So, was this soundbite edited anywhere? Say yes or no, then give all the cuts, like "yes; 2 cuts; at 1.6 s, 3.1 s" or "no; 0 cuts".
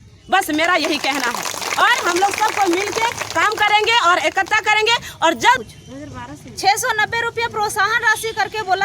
yes; 1 cut; at 5.6 s